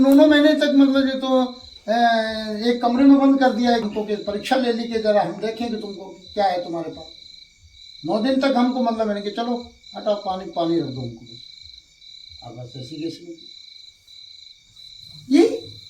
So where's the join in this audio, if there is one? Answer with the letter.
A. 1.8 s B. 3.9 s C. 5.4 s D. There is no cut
B